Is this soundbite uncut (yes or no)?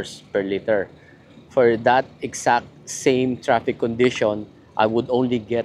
yes